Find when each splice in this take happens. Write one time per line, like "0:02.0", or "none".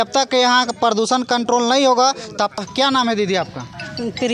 0:02.6